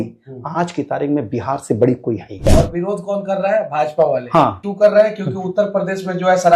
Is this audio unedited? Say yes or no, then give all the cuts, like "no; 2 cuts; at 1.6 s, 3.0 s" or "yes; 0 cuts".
no; 2 cuts; at 2.4 s, 4.6 s